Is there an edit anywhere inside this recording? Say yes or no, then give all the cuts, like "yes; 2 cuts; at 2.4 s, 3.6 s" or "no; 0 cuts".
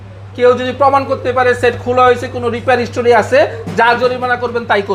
no; 0 cuts